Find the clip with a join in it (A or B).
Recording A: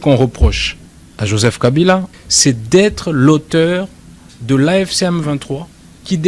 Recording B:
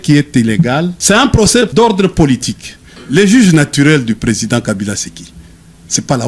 B